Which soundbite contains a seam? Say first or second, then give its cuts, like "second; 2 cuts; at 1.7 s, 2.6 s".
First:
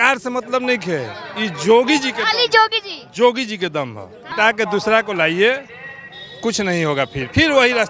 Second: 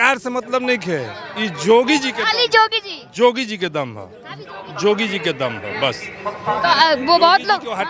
first; 1 cut; at 4.3 s